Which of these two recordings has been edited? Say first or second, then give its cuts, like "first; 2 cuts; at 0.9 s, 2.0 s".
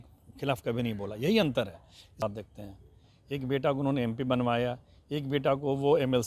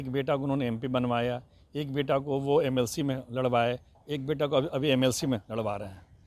first; 1 cut; at 2.2 s